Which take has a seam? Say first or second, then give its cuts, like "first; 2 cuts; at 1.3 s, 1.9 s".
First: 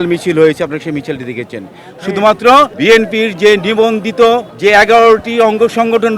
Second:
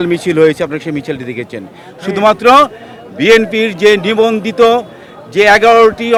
first; 2 cuts; at 2.7 s, 4.5 s